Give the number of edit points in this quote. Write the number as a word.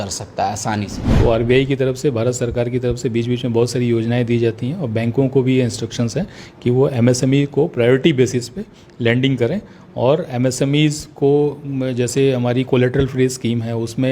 one